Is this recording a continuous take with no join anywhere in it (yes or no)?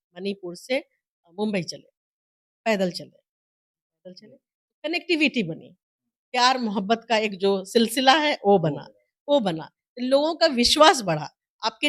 yes